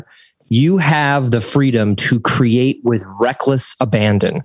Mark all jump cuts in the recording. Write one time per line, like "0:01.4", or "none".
none